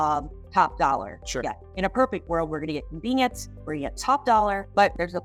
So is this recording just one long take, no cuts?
yes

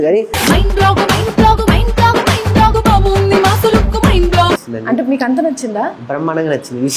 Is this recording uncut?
no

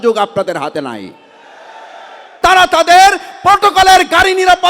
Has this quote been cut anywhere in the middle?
yes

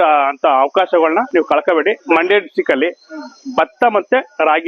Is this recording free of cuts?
no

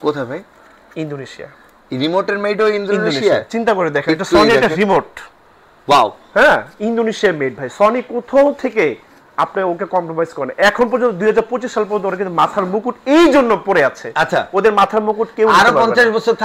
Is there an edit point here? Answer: no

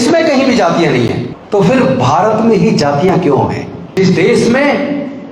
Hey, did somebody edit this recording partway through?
yes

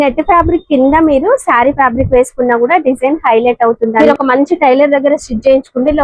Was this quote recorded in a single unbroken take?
no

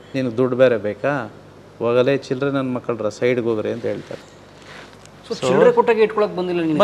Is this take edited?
no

